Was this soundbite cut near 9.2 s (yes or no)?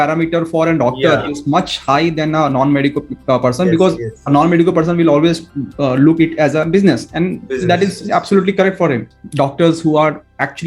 yes